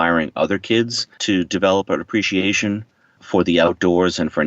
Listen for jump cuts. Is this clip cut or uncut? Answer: cut